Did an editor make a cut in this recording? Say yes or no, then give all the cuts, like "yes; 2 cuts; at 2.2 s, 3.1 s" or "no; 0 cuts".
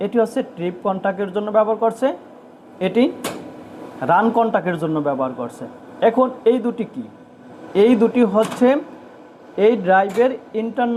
no; 0 cuts